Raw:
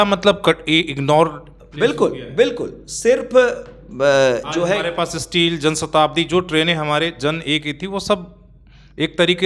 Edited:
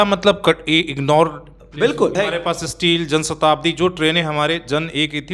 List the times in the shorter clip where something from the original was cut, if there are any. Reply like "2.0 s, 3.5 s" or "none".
2.1 s